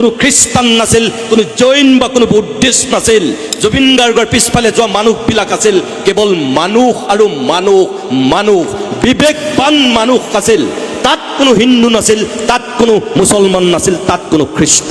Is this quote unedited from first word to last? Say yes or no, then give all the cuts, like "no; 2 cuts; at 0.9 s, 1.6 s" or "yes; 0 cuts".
yes; 0 cuts